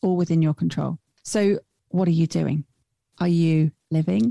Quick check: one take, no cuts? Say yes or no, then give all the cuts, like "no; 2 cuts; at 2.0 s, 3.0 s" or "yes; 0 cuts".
no; 2 cuts; at 1.1 s, 1.8 s